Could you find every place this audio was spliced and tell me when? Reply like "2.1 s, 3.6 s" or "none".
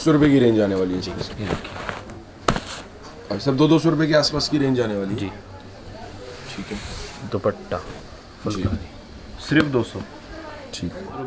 none